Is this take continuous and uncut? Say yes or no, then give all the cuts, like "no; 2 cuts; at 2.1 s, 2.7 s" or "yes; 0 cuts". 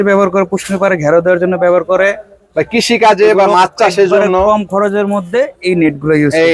yes; 0 cuts